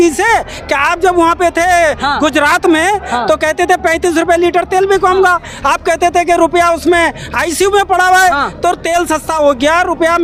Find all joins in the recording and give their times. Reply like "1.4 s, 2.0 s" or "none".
none